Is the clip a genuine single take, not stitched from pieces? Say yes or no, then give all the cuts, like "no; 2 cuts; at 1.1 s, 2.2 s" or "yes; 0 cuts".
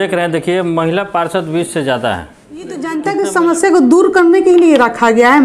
no; 1 cut; at 2.8 s